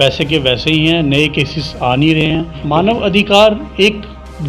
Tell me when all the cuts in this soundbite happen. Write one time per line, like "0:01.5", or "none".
0:02.2